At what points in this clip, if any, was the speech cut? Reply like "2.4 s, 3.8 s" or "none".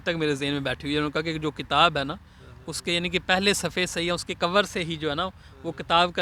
none